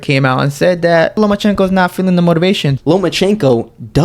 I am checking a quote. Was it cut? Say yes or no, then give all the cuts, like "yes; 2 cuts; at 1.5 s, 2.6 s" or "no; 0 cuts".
yes; 2 cuts; at 1.2 s, 2.7 s